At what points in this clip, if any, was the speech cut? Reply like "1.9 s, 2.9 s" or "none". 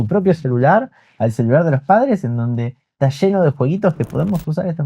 none